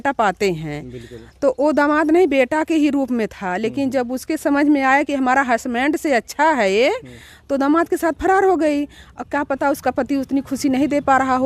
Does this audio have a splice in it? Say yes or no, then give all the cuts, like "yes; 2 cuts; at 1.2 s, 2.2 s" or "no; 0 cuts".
no; 0 cuts